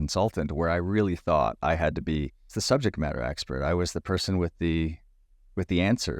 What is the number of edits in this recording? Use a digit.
1